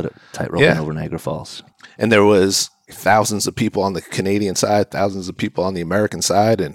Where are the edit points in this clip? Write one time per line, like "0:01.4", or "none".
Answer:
0:02.9